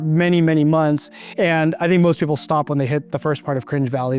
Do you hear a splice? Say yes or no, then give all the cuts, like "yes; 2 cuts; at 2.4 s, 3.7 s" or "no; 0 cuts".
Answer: yes; 2 cuts; at 1.2 s, 3.1 s